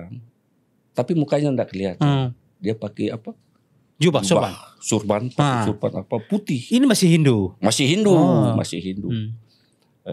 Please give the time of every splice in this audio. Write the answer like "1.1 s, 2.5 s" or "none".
none